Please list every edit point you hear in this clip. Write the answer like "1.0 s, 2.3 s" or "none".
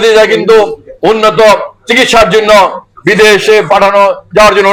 none

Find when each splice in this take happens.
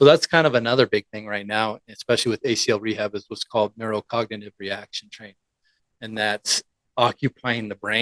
none

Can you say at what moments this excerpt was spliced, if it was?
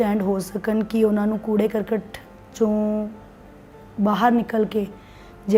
none

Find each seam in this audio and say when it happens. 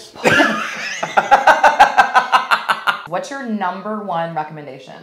2.9 s

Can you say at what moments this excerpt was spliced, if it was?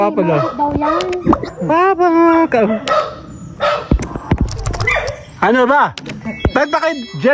none

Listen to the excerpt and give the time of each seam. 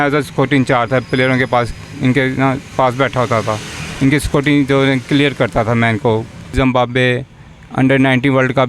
6.5 s

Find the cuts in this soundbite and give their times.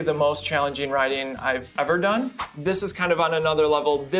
1.7 s, 2.4 s

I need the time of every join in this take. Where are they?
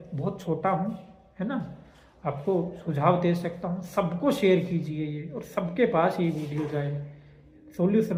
none

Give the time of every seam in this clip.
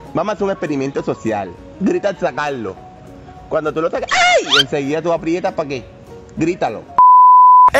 6.9 s

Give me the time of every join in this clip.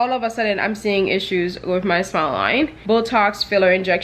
2.8 s

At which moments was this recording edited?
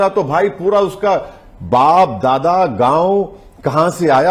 none

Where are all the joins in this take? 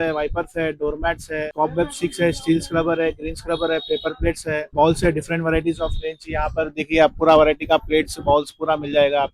1.5 s, 4.7 s

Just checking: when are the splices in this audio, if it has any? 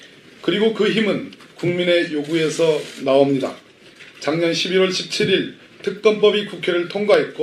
5.4 s

